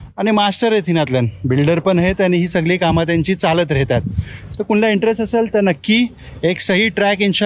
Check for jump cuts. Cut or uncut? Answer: uncut